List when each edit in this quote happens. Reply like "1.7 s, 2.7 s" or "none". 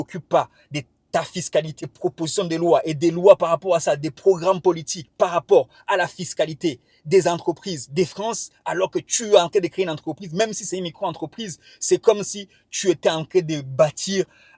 1.9 s

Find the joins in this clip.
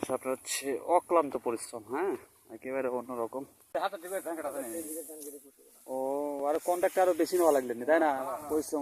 3.7 s

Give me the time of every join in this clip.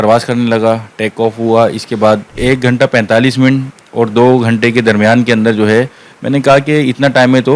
2.3 s

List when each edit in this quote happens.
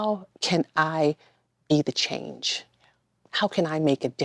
none

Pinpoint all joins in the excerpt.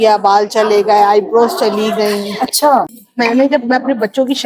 3.0 s

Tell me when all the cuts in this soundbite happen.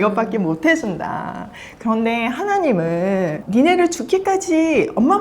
3.4 s

